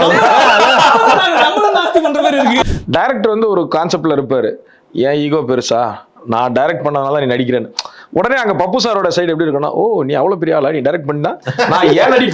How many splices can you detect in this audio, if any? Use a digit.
1